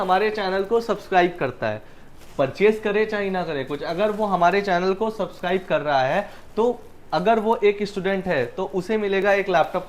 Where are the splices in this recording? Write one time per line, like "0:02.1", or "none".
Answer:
none